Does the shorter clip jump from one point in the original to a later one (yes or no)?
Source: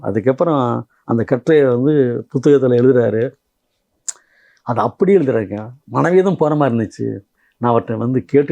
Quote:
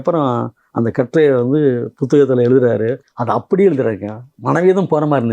yes